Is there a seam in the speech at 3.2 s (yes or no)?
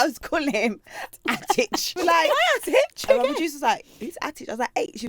no